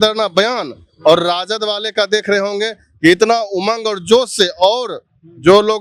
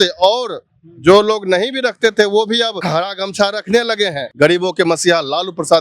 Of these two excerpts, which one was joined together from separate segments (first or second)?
second